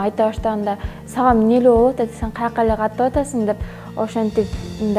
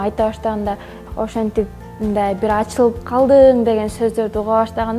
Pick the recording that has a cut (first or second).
second